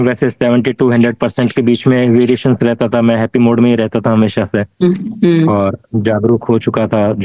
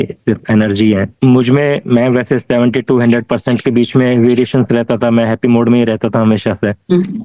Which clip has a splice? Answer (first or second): second